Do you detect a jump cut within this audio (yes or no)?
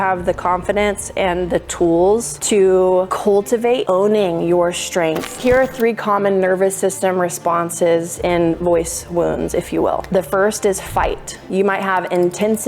yes